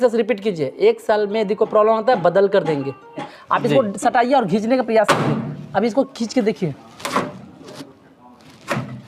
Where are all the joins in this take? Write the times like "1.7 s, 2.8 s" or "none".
3.3 s